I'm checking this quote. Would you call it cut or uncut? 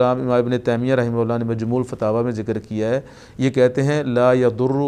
uncut